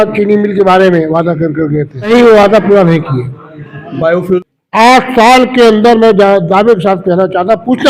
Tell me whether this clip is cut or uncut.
cut